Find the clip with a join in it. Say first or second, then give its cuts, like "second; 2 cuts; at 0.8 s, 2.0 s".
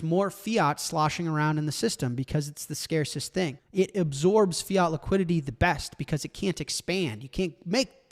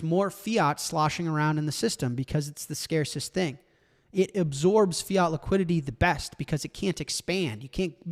first; 1 cut; at 3.6 s